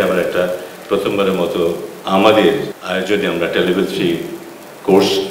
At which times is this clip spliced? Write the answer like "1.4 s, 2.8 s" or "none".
2.8 s